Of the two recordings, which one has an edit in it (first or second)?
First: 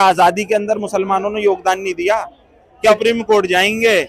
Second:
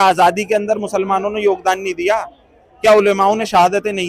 first